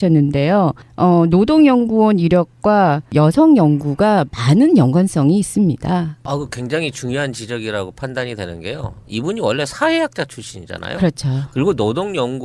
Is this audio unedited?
no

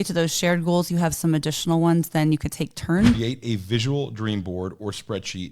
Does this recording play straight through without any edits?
no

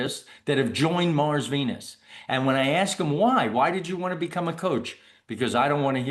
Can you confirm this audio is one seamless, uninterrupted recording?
yes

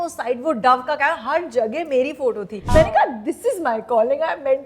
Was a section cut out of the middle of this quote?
yes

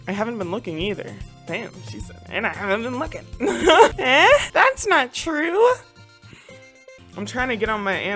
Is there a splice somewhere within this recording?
no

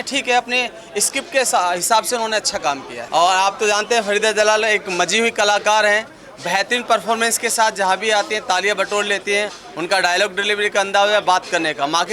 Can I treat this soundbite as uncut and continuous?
yes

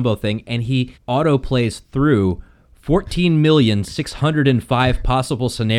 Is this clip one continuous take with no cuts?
no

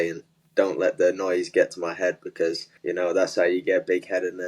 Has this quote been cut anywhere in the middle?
yes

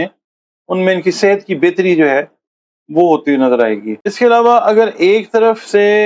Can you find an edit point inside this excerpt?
yes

